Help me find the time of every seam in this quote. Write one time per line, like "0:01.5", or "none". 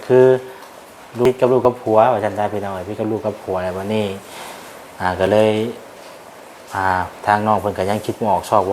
0:01.1